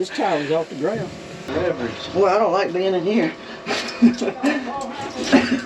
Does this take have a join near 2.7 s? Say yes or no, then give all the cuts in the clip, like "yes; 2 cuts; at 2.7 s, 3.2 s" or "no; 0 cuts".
no; 1 cut; at 1.4 s